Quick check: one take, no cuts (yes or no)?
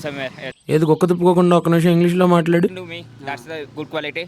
no